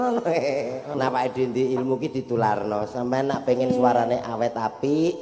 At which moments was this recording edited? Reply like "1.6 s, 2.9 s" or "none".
0.9 s